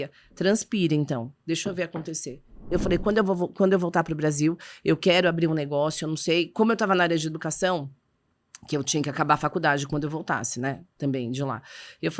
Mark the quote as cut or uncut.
cut